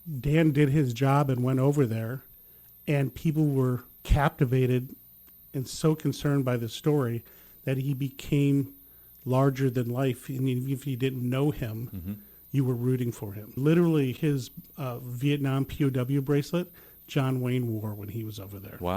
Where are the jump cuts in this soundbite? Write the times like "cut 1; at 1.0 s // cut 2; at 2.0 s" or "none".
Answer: cut 1; at 3.9 s